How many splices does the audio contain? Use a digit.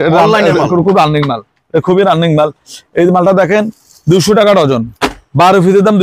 0